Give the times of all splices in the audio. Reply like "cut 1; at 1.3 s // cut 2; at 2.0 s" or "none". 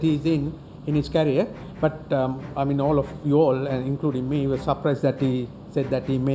none